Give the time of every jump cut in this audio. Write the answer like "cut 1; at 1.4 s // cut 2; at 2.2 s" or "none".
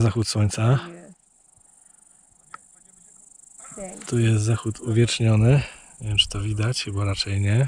none